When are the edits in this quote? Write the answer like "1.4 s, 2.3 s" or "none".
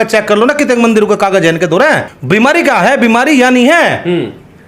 2.1 s